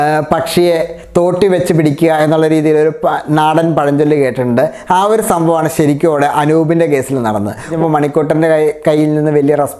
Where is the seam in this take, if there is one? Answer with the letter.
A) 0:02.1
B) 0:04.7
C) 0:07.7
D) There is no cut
C